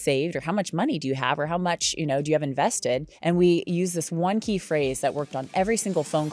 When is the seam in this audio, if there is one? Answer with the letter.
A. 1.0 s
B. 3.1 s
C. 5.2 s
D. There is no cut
B